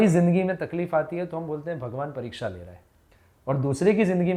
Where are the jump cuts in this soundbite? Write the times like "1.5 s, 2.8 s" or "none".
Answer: none